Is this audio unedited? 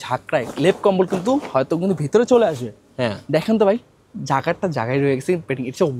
yes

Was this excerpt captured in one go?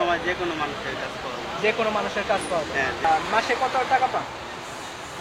no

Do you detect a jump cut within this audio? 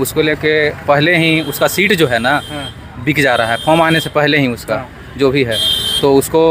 no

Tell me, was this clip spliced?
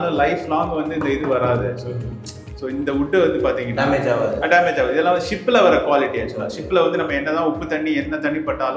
no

